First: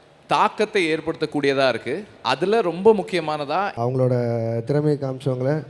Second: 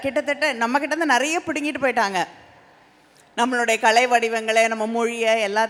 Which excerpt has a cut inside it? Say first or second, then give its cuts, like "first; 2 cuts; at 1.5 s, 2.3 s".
first; 1 cut; at 3.7 s